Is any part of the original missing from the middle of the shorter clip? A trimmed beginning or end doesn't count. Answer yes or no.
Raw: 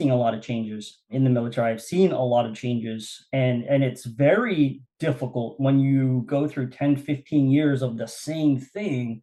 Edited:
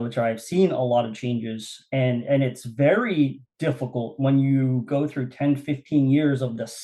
no